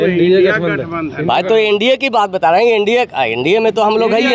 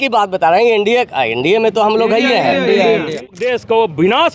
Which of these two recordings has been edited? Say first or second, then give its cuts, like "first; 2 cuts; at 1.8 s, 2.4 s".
second; 1 cut; at 3.3 s